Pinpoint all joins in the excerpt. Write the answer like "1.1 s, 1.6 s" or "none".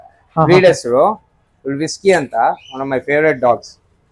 none

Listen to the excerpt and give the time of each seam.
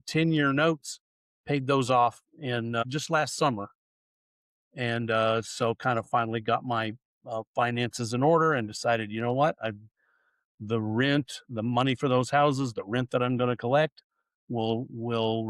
2.8 s

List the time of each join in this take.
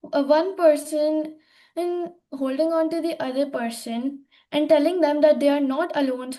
none

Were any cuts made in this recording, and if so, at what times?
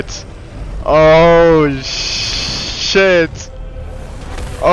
none

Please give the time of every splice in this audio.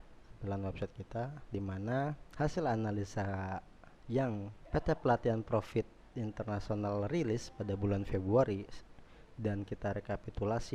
2.2 s, 4.6 s

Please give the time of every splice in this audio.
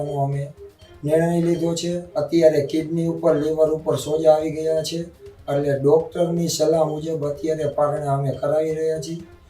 2.0 s

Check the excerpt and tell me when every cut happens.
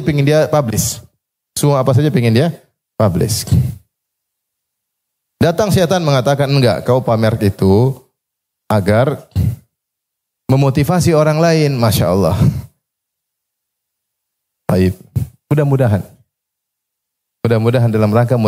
none

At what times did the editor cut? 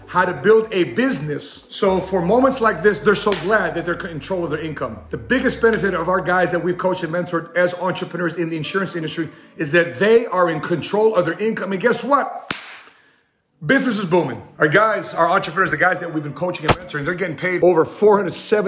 14.4 s, 17.6 s

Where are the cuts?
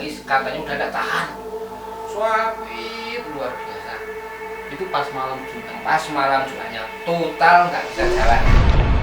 8.1 s

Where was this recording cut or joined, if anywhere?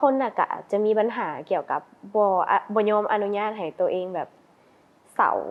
none

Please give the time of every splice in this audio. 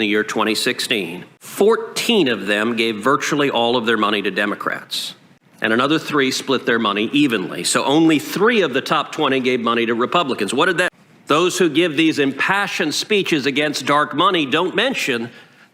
10.9 s

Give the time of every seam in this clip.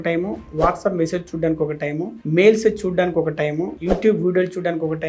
none

